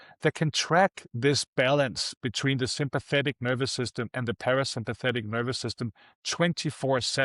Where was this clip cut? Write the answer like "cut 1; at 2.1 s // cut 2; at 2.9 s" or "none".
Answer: none

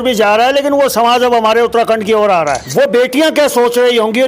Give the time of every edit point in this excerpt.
cut 1; at 2.6 s

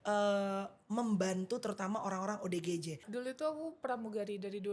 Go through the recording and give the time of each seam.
cut 1; at 3.0 s

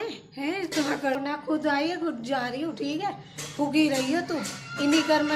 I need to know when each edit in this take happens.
cut 1; at 1.2 s

